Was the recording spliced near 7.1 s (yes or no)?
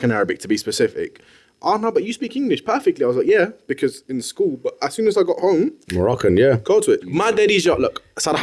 yes